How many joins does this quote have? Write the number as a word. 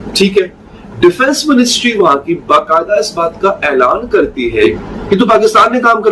one